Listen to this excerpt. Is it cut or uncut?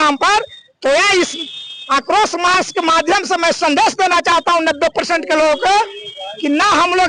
uncut